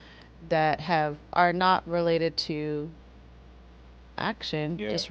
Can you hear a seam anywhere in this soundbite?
no; 0 cuts

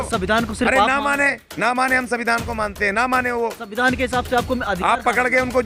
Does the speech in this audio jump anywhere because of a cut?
no; 0 cuts

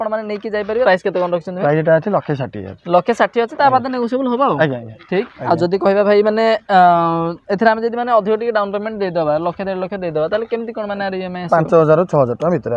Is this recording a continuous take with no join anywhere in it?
no; 2 cuts; at 0.8 s, 5.4 s

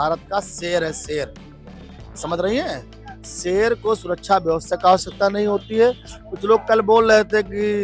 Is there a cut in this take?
no; 0 cuts

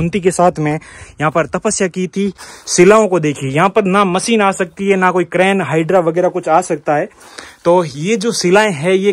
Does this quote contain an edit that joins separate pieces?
yes; 1 cut; at 2.5 s

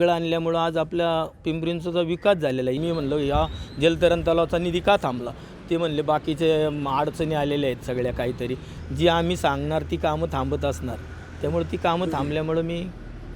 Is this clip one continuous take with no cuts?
no; 2 cuts; at 2.8 s, 8.7 s

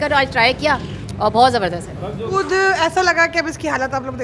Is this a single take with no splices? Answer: no; 1 cut; at 2.3 s

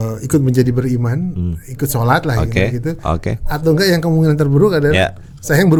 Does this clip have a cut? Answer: no; 0 cuts

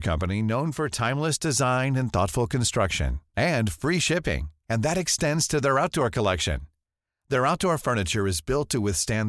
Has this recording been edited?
no; 0 cuts

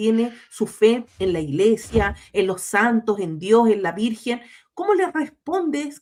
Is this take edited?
no; 0 cuts

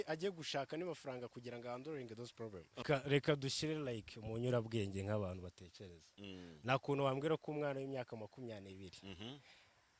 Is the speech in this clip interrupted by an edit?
yes; 1 cut; at 2.8 s

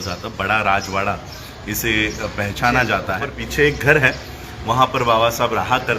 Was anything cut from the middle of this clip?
yes; 1 cut; at 3.4 s

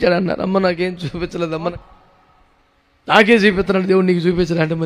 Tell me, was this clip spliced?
yes; 1 cut; at 1.5 s

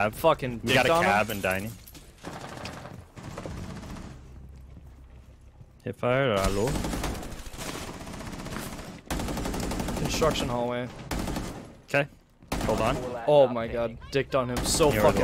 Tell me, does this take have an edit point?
yes; 1 cut; at 2.2 s

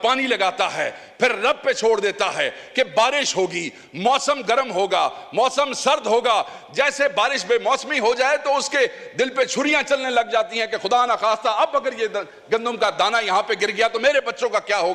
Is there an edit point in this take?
no; 0 cuts

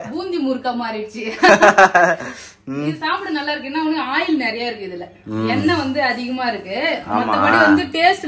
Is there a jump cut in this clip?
no; 0 cuts

